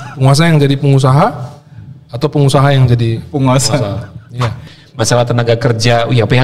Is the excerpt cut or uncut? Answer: cut